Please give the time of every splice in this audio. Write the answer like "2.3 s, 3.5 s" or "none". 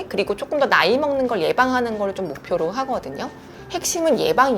3.5 s